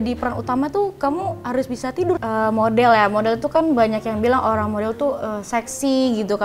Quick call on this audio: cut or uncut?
cut